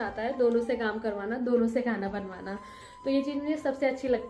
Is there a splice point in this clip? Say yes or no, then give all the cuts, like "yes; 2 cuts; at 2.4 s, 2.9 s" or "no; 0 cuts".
no; 0 cuts